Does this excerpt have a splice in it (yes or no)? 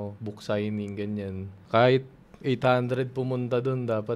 yes